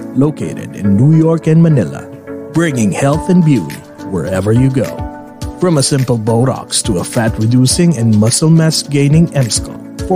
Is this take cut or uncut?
uncut